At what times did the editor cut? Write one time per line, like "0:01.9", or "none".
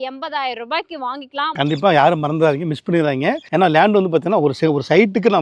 0:01.5
0:03.4